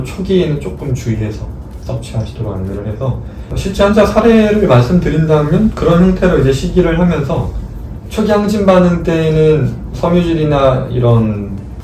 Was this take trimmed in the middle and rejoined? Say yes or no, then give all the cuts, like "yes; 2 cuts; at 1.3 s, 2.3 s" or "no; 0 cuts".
yes; 1 cut; at 3.4 s